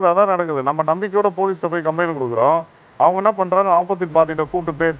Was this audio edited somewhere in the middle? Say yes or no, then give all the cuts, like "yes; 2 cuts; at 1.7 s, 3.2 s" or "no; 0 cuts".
no; 0 cuts